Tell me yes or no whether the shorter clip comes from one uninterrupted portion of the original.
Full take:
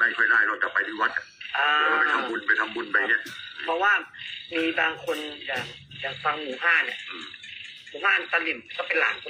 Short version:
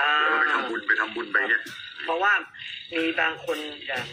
yes